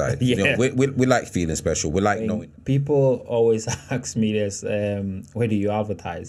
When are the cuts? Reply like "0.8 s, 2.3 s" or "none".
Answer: 2.3 s